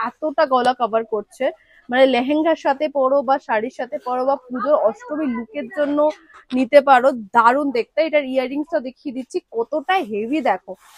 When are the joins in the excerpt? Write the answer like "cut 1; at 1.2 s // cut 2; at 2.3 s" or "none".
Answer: none